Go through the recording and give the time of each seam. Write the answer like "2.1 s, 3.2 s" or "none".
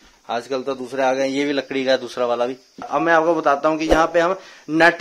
2.9 s

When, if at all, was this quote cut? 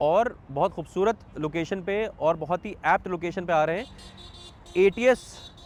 none

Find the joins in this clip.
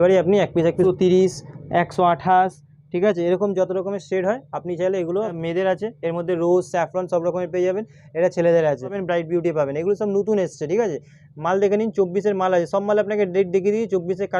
0.8 s, 5.3 s, 9.0 s

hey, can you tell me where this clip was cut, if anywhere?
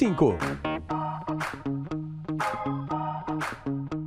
none

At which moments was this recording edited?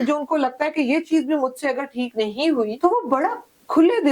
2.7 s

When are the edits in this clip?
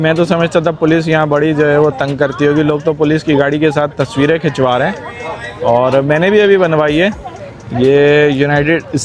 none

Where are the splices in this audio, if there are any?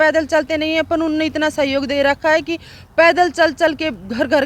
none

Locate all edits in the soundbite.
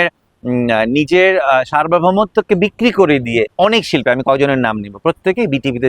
3.5 s

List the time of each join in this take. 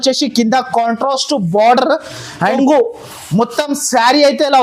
2.6 s

